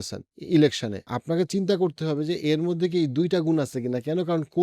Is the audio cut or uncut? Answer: uncut